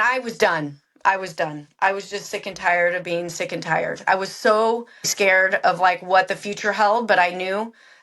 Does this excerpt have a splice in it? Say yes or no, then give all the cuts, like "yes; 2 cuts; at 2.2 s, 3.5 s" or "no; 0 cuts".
yes; 2 cuts; at 4.0 s, 5.1 s